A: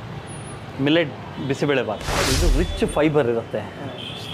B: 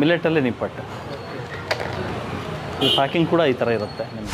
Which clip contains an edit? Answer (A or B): A